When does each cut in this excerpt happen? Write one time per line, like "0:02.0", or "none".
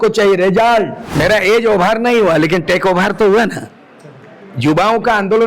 0:01.0